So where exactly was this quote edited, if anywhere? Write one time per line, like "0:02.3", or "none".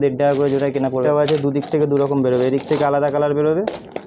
0:01.0